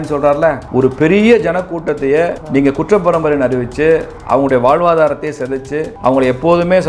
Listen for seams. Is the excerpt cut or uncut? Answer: cut